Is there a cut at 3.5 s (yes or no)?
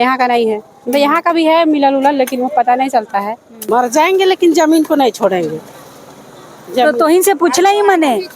yes